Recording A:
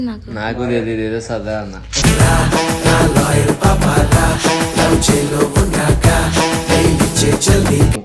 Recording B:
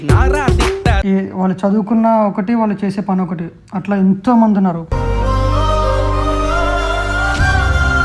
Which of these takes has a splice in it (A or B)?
B